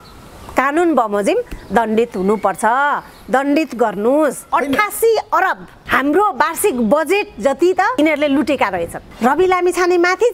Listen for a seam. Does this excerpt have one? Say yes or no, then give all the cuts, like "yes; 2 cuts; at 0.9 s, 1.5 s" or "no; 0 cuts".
yes; 4 cuts; at 4.4 s, 5.7 s, 7.9 s, 9.1 s